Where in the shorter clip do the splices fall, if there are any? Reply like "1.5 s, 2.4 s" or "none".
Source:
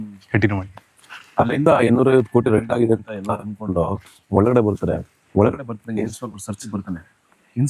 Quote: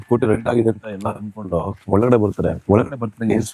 1.8 s, 2.6 s